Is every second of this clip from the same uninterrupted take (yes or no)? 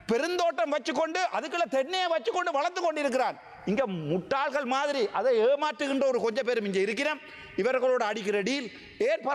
yes